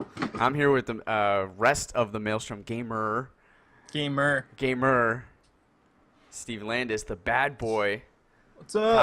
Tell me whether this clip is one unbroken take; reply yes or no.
no